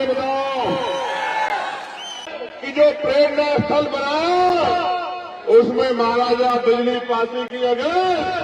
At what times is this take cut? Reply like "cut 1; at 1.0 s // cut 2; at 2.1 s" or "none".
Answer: cut 1; at 2.3 s